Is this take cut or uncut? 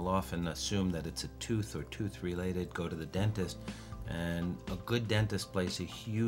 uncut